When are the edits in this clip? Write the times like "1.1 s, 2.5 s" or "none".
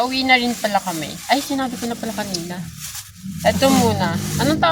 none